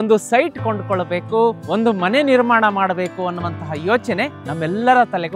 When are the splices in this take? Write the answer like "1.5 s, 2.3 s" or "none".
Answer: 1.6 s, 4.4 s